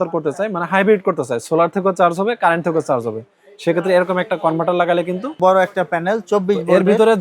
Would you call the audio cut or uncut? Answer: cut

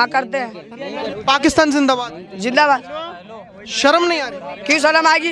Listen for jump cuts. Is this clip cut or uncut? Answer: cut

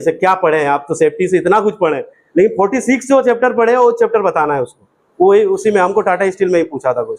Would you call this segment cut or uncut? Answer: uncut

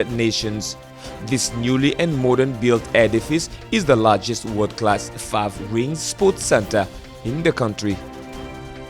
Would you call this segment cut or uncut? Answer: uncut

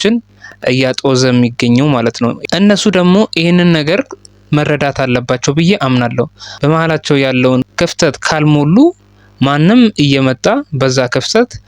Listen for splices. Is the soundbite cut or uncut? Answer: cut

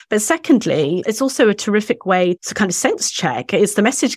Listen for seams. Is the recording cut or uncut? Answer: cut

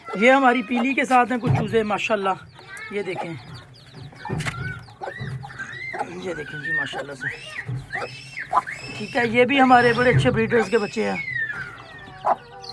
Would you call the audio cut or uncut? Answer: uncut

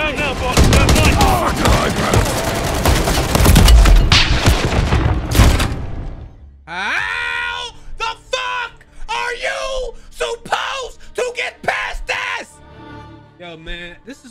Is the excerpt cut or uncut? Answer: uncut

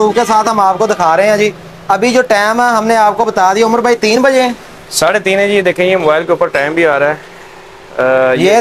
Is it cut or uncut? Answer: uncut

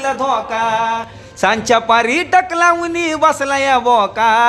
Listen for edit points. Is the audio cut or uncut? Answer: uncut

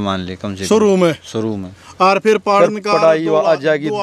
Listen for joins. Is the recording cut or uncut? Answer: uncut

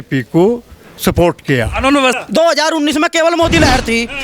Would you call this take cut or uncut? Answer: cut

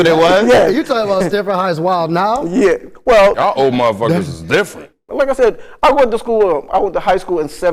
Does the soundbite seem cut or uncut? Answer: cut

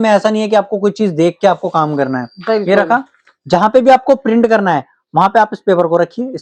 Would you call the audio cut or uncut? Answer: uncut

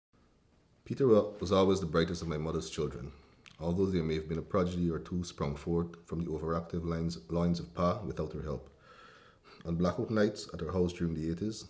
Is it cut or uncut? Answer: uncut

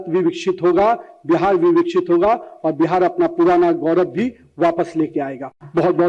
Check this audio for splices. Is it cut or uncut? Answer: uncut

